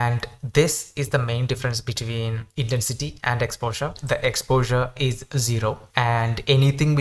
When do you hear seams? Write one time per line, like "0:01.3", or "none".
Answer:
0:04.0